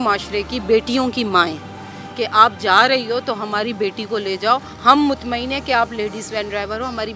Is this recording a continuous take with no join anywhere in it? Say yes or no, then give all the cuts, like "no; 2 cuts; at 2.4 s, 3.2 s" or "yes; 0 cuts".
yes; 0 cuts